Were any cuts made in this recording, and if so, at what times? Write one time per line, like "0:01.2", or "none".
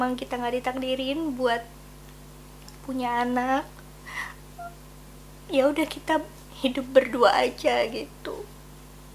none